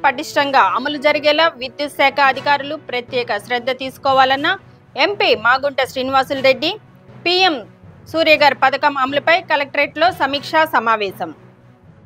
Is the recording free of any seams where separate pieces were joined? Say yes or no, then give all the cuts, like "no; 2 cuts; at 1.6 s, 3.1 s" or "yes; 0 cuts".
yes; 0 cuts